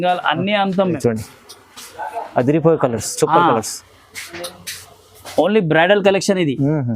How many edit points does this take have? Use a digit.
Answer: 1